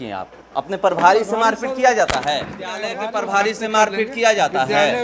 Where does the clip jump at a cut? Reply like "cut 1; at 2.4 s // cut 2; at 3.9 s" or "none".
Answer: cut 1; at 2.9 s